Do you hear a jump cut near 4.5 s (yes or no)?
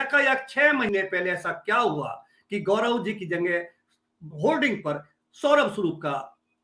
no